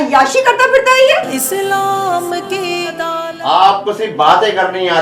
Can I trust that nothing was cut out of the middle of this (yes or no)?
no